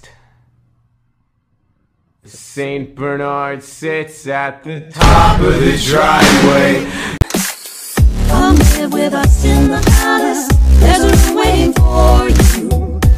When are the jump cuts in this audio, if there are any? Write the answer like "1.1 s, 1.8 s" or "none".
7.1 s